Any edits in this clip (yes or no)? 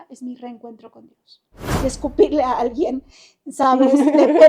yes